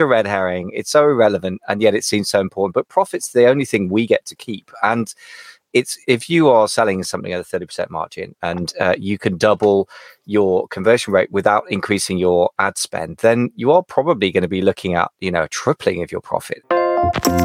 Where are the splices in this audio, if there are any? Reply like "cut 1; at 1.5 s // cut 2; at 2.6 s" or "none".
cut 1; at 16.5 s